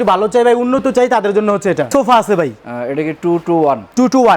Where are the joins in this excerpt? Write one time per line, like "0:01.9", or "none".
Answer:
0:01.9